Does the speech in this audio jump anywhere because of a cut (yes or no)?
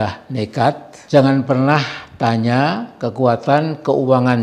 yes